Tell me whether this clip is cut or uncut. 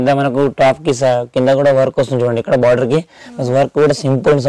uncut